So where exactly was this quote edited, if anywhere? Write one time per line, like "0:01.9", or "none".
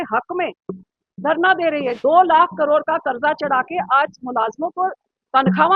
0:02.0